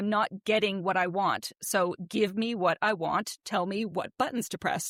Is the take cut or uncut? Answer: uncut